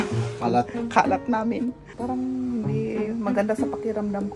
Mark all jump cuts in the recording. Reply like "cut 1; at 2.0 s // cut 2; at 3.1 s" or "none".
cut 1; at 1.9 s